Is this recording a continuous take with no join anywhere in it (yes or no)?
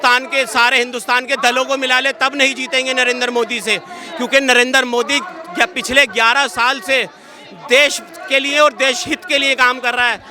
yes